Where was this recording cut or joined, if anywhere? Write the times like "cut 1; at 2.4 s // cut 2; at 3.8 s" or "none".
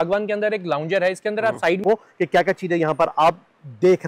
cut 1; at 1.8 s

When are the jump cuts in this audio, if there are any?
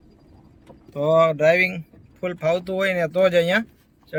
none

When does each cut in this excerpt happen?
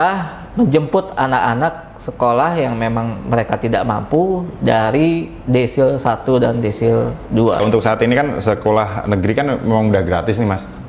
cut 1; at 7.6 s

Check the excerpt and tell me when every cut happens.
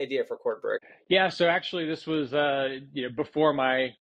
cut 1; at 0.9 s

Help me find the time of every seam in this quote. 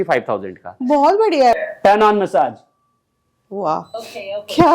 cut 1; at 1.5 s

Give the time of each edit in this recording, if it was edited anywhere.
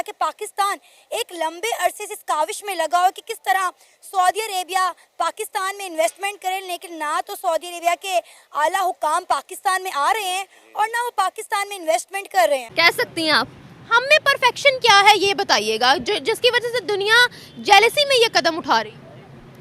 cut 1; at 12.7 s

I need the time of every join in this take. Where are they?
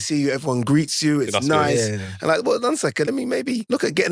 cut 1; at 3.2 s

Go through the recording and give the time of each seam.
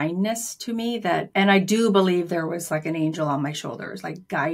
cut 1; at 1.3 s

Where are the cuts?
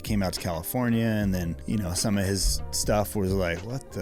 cut 1; at 1.6 s

